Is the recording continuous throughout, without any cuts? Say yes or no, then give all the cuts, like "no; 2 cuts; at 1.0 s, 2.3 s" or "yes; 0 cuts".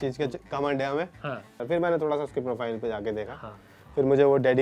no; 1 cut; at 1.5 s